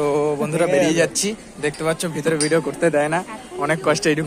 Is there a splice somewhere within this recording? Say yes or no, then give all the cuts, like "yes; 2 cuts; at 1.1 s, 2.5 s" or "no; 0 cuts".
no; 0 cuts